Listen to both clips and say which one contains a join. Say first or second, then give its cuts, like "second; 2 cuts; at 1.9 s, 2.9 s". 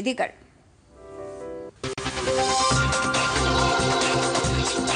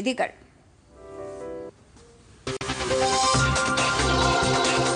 first; 1 cut; at 1.7 s